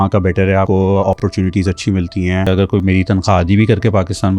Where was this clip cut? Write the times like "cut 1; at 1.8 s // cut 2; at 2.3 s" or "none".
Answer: cut 1; at 0.9 s // cut 2; at 2.8 s